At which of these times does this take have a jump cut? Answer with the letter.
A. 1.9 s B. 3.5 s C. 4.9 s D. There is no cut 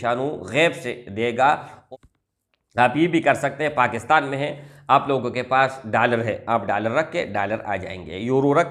A